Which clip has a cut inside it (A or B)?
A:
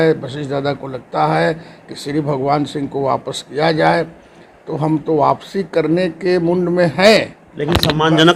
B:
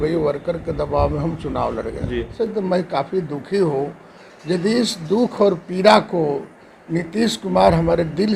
B